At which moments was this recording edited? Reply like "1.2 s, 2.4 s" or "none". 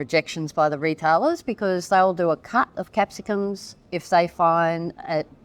3.9 s